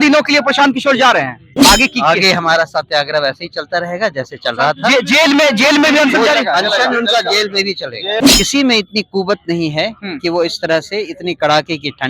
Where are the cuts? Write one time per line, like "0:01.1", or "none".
0:01.5
0:08.3